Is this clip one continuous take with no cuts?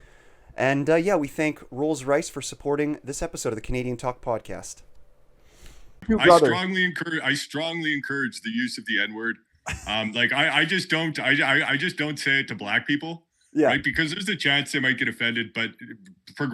no; 1 cut; at 6.0 s

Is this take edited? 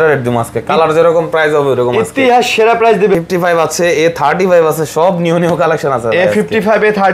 yes; 1 cut; at 3.2 s

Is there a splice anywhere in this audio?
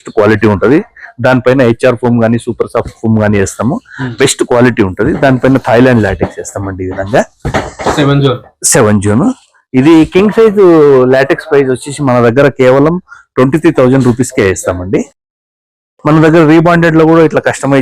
no; 0 cuts

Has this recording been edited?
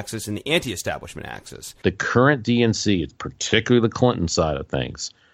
yes; 1 cut; at 1.7 s

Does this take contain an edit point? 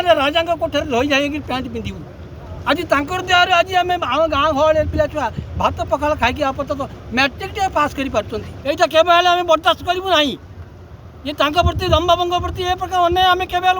yes; 1 cut; at 8.4 s

